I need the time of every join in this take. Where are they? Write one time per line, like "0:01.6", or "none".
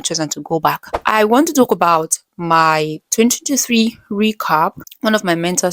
0:01.0
0:04.9